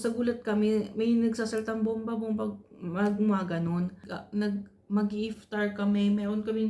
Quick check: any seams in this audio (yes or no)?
yes